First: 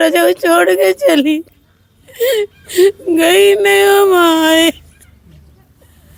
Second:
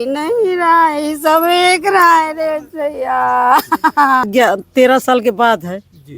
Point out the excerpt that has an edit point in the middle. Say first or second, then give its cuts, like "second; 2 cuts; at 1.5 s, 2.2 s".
second; 1 cut; at 4.3 s